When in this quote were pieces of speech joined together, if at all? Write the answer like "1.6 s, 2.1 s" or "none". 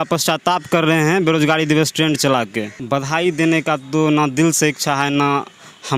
2.8 s